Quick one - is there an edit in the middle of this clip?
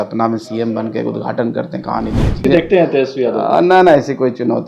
yes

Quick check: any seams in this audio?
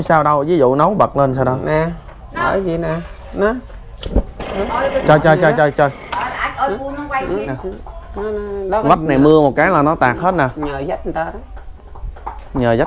yes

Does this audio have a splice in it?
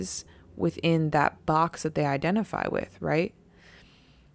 no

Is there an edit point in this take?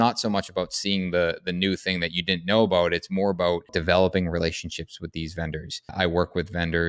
yes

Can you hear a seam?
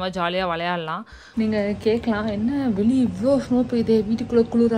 yes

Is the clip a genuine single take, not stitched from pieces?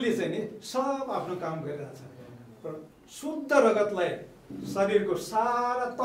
yes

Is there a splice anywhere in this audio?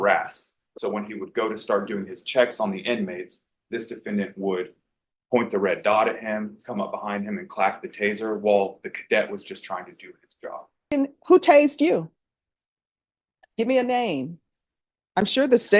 yes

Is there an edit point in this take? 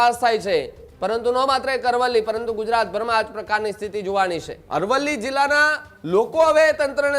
yes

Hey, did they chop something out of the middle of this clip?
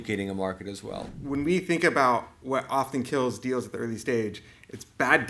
yes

